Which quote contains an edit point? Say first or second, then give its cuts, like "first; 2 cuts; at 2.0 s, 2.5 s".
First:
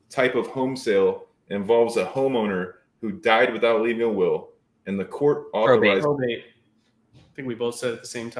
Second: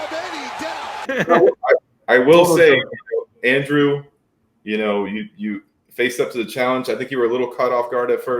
second; 1 cut; at 1.0 s